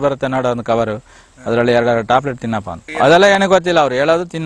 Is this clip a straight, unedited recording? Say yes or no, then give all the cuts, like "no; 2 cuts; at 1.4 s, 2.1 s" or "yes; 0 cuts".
yes; 0 cuts